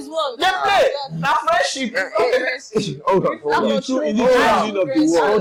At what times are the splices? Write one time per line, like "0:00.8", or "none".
none